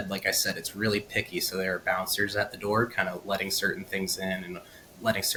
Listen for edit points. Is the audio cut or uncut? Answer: uncut